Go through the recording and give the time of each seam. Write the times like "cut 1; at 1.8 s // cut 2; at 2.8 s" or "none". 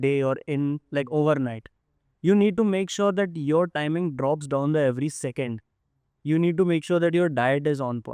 none